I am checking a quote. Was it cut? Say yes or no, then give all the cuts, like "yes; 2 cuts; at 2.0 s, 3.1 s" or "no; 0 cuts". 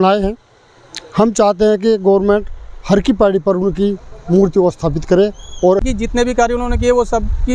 yes; 1 cut; at 5.8 s